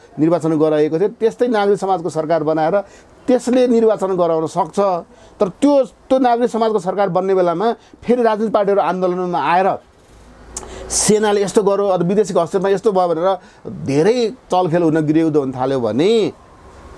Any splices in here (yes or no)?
no